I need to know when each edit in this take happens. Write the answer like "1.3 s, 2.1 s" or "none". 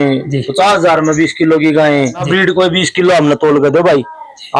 2.3 s